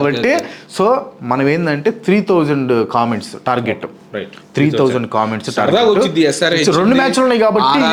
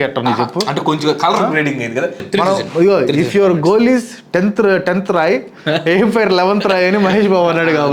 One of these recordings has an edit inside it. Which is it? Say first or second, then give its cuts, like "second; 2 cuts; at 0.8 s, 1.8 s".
second; 1 cut; at 2.2 s